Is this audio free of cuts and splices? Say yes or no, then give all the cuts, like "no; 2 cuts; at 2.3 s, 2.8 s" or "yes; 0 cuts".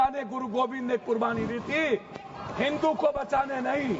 yes; 0 cuts